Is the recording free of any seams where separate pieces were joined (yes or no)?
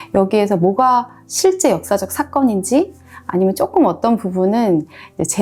yes